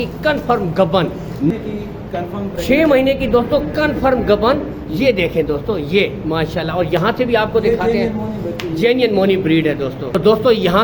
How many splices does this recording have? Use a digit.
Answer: 1